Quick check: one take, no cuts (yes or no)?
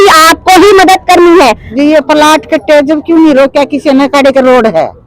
no